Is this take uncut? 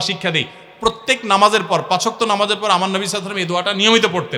yes; 0 cuts

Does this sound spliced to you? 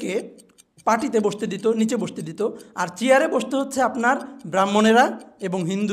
no; 0 cuts

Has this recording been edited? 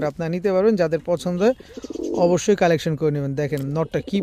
no; 0 cuts

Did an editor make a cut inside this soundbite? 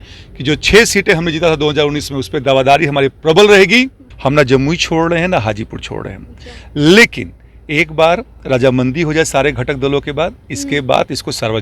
yes; 1 cut; at 4.0 s

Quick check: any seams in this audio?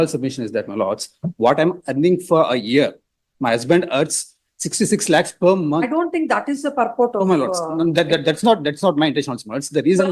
no; 0 cuts

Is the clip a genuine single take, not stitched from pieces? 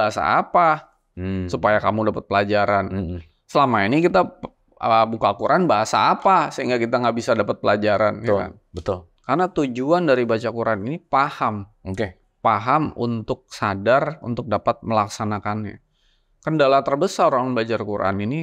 no; 1 cut; at 9.1 s

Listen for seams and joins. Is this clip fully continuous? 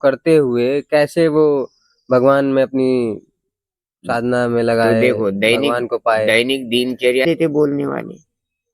no; 1 cut; at 7.2 s

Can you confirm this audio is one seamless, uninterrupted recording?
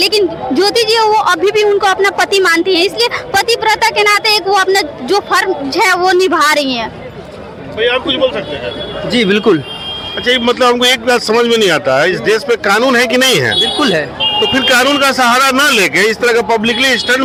yes; 0 cuts

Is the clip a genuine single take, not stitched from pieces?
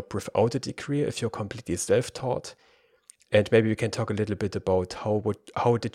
yes; 0 cuts

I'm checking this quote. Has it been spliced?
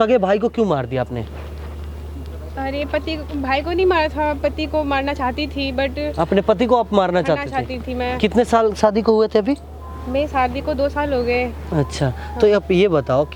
no; 0 cuts

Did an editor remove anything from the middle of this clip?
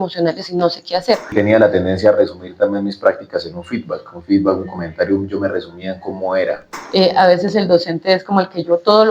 yes; 2 cuts; at 1.3 s, 6.7 s

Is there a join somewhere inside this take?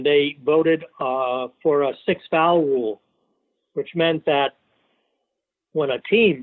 no; 0 cuts

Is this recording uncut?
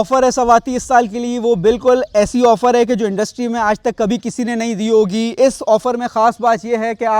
yes; 0 cuts

